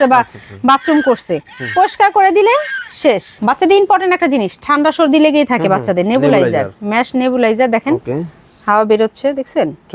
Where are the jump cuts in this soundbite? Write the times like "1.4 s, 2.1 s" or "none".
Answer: 3.3 s